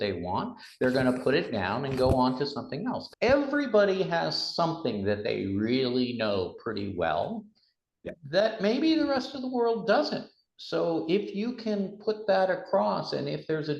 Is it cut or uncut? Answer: cut